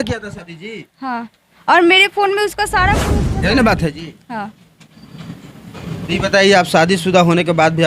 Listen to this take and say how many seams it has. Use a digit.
1